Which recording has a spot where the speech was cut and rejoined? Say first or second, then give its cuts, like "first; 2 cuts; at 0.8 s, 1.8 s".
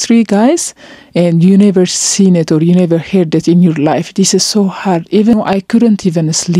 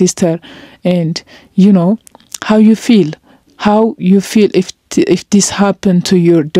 first; 1 cut; at 5.3 s